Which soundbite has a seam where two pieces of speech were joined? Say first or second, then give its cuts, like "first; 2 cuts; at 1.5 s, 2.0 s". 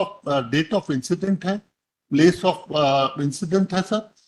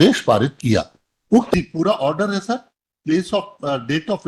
second; 1 cut; at 1.5 s